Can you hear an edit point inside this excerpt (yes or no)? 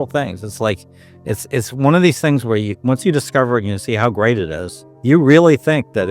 no